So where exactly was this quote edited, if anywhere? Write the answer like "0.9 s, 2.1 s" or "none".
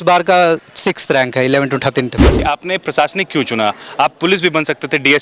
2.4 s